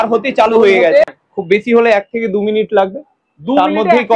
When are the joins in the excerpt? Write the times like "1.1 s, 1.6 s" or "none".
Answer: 1.0 s